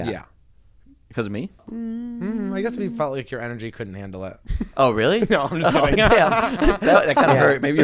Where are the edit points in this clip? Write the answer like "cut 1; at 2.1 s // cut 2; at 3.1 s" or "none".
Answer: cut 1; at 1.7 s